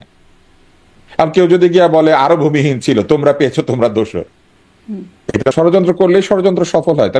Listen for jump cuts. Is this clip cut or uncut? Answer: cut